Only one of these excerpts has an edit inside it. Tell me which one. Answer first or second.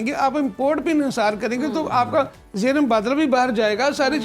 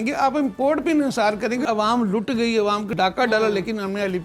second